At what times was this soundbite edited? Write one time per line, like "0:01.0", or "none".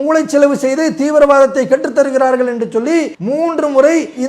0:03.2